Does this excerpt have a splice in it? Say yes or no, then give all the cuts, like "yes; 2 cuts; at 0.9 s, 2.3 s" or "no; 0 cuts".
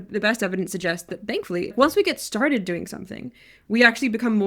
yes; 1 cut; at 1.7 s